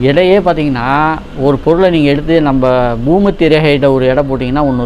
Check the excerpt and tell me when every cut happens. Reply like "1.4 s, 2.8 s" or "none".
none